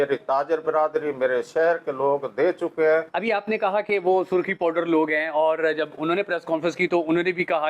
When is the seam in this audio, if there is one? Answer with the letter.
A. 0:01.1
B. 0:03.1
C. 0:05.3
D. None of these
B